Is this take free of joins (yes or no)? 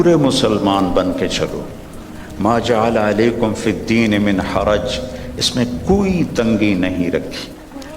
no